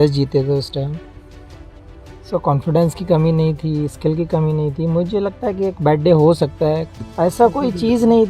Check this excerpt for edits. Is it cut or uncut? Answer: cut